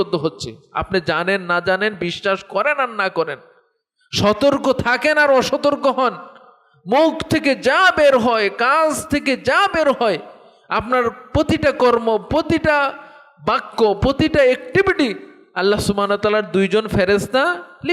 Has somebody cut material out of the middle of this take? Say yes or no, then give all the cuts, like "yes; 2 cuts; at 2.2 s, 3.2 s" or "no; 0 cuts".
no; 0 cuts